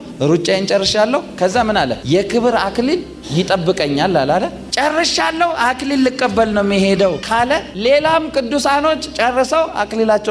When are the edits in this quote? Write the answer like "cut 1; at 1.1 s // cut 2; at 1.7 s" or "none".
none

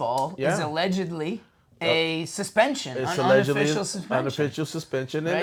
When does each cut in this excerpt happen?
none

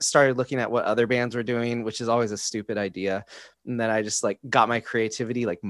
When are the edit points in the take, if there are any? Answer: none

